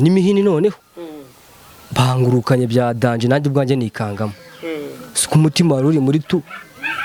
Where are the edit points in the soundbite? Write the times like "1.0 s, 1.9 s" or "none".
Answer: none